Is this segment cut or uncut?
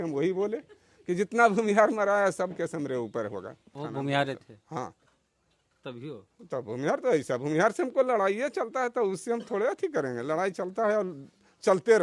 cut